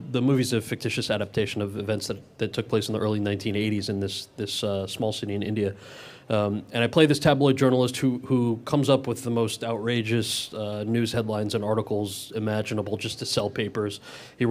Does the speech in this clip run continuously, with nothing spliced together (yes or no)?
no